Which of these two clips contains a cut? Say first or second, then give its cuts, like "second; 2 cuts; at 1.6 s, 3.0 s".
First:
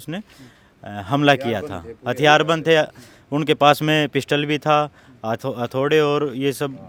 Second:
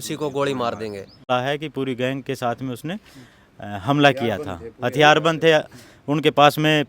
second; 1 cut; at 1.2 s